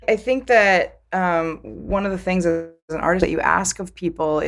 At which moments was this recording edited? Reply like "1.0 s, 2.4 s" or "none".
none

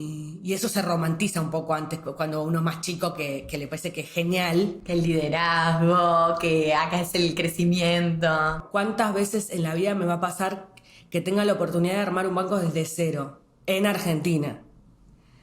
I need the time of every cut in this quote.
8.6 s

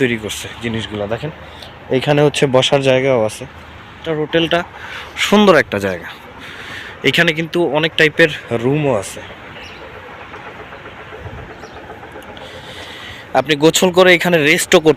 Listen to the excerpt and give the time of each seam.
4.0 s

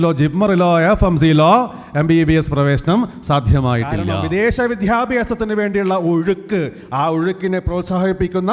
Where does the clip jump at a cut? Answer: 4.1 s

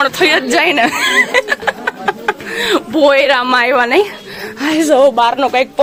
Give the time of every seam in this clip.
none

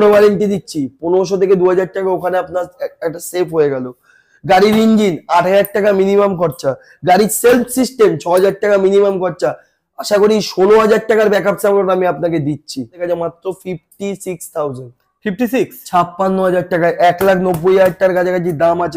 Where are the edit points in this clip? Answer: 13.0 s

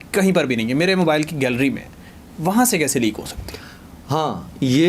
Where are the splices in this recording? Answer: none

